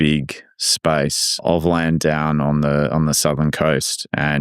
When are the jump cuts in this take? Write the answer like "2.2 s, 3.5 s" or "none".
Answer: 1.5 s